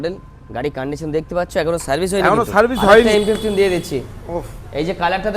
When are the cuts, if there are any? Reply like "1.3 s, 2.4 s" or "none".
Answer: 3.1 s